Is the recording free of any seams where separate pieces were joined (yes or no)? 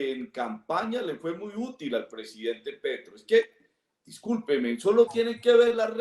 yes